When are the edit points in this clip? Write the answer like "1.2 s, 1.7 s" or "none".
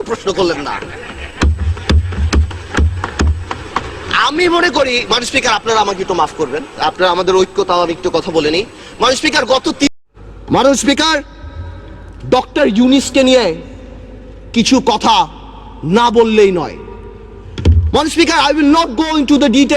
9.9 s

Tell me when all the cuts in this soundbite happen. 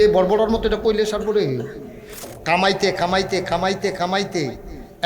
2.1 s

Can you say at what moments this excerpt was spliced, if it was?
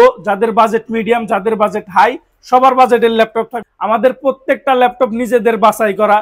3.6 s

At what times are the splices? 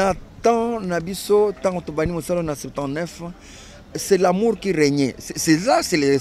none

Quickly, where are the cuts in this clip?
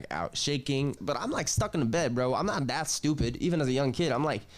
1.0 s

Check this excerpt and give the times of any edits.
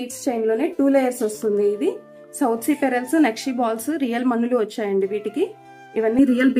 none

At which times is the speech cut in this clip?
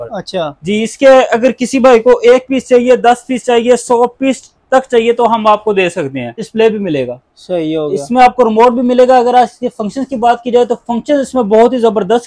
6.4 s

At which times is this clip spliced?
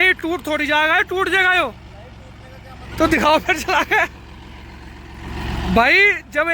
none

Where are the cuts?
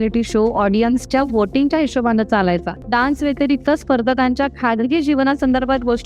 2.8 s

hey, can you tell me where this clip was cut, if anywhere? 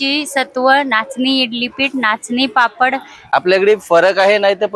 3.1 s

